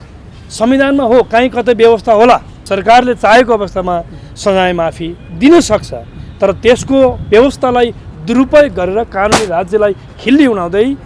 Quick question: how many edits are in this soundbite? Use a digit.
1